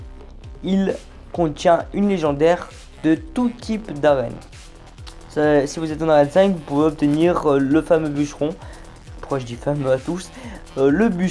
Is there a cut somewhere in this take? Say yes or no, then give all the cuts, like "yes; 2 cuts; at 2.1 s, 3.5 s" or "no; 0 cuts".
yes; 1 cut; at 1.9 s